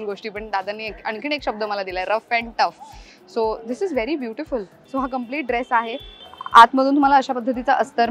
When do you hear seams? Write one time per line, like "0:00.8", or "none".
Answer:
0:04.8
0:06.1